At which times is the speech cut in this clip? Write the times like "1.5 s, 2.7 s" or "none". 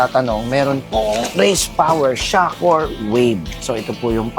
none